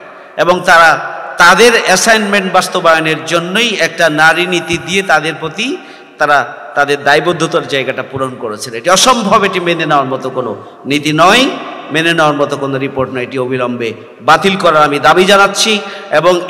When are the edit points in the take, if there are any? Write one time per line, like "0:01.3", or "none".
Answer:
none